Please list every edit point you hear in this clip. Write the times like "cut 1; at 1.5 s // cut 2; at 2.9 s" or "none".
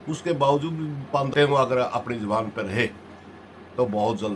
cut 1; at 1.3 s